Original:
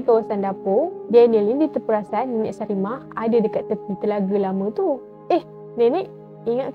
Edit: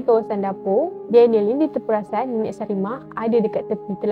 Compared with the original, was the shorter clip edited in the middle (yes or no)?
no